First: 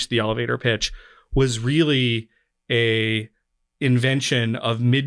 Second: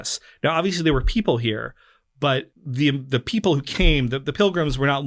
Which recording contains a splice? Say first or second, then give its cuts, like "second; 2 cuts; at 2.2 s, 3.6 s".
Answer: second; 1 cut; at 2.6 s